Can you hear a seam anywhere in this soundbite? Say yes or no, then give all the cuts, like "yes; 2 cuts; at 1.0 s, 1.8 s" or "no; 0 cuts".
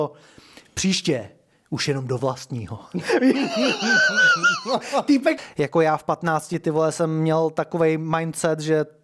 yes; 1 cut; at 5.4 s